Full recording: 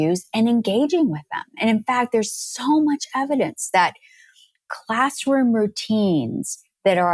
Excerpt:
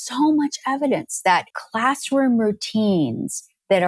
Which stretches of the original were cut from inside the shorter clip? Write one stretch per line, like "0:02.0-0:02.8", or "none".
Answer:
0:04.1-0:04.8